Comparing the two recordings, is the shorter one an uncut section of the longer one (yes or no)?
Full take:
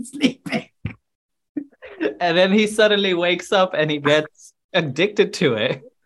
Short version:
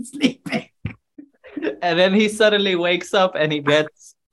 no